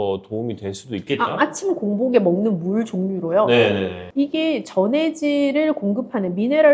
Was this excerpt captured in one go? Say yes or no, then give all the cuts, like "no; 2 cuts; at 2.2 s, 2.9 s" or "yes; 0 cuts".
yes; 0 cuts